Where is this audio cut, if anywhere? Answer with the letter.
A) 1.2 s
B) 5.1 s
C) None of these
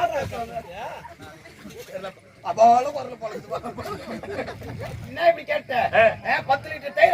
B